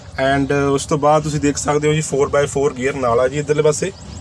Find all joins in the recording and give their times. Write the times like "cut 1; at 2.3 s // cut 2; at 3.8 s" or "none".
none